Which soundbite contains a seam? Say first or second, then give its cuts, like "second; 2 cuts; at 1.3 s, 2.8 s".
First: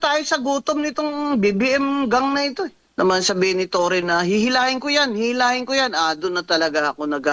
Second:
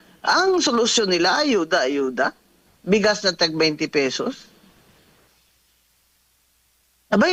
first; 1 cut; at 2.8 s